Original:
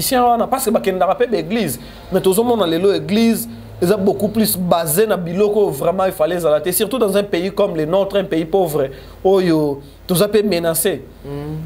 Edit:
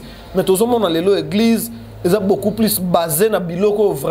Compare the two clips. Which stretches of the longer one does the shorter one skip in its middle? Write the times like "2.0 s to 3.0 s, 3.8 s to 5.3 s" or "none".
none